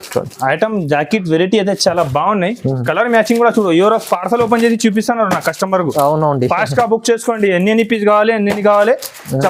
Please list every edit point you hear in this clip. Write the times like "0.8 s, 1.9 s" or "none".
none